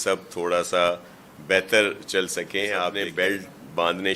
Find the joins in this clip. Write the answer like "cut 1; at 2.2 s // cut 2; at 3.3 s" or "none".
cut 1; at 3.0 s